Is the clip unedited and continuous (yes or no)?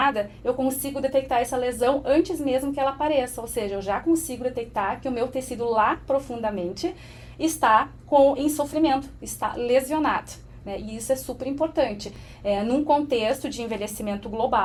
yes